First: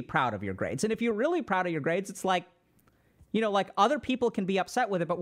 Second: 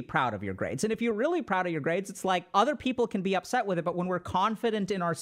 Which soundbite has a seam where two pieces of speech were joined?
second; 1 cut; at 2.5 s

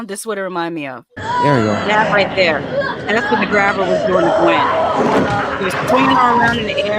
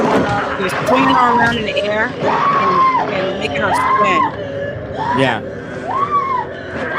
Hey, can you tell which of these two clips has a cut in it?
first; 1 cut; at 1.1 s

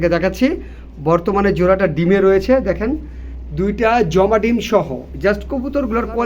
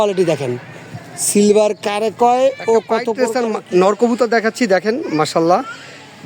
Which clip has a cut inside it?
second; 1 cut; at 3.1 s

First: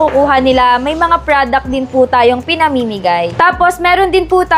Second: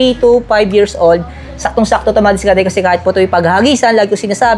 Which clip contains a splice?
first; 1 cut; at 3.3 s

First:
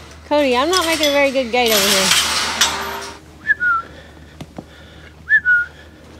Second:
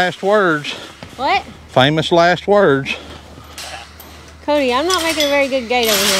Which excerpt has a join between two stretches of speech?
first; 1 cut; at 3.0 s

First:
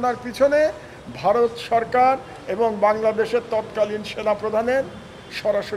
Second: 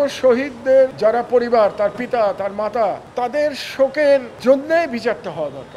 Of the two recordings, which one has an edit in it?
second; 3 cuts; at 0.9 s, 3.0 s, 4.3 s

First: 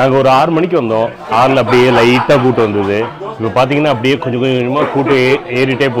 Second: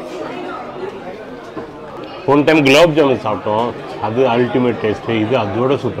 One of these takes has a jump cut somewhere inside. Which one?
second; 1 cut; at 1.9 s

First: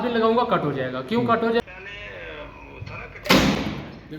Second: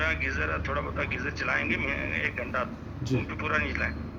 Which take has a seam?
first; 2 cuts; at 1.6 s, 3.1 s

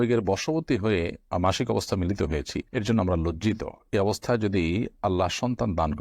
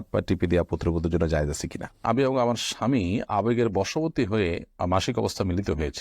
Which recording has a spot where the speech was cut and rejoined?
second; 1 cut; at 2.0 s

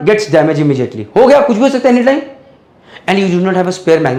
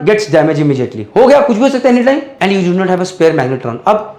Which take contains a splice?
second; 1 cut; at 2.3 s

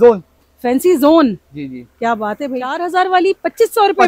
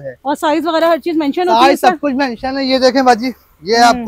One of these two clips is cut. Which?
first; 1 cut; at 2.8 s

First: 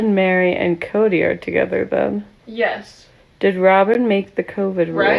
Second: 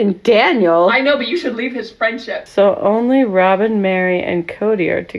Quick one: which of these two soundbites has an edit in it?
second; 1 cut; at 2.4 s

